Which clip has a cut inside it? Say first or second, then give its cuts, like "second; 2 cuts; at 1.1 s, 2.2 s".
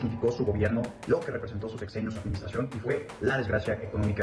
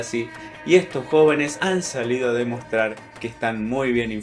second; 1 cut; at 1.6 s